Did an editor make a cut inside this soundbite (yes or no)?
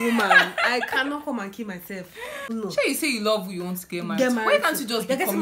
yes